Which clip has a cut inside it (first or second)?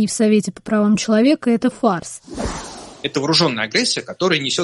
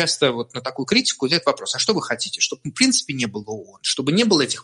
first